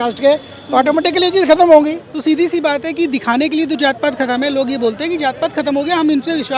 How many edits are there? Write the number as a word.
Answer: one